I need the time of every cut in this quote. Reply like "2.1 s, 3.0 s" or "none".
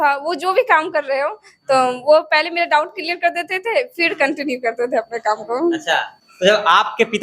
6.2 s